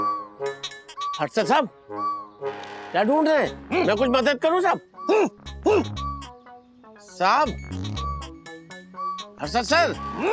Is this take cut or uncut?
uncut